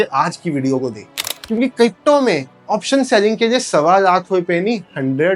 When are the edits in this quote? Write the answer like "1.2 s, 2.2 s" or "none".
1.4 s